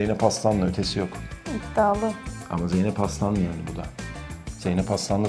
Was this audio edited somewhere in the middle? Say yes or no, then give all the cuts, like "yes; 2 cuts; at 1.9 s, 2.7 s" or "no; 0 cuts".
no; 0 cuts